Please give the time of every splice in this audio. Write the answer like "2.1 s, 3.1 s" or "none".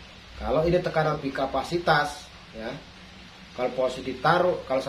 1.2 s